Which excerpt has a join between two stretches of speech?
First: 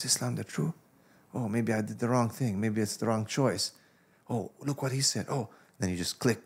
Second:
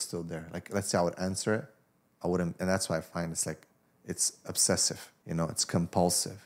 second; 1 cut; at 5.1 s

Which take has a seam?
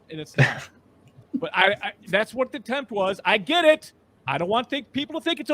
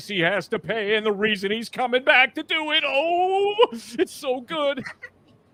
first; 1 cut; at 1.2 s

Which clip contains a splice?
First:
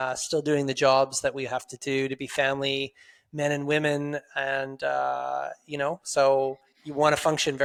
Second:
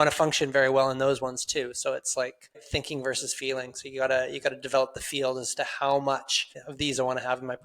second; 2 cuts; at 2.6 s, 6.6 s

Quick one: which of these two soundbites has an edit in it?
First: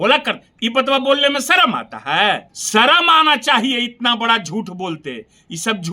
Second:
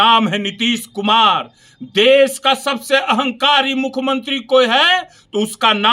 first; 1 cut; at 2.5 s

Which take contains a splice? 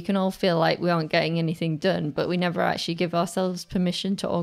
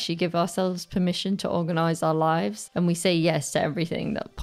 second; 1 cut; at 2.6 s

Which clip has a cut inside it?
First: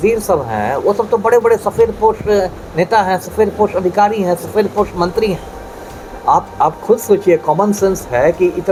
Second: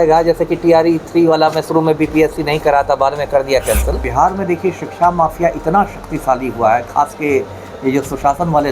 second; 1 cut; at 4.1 s

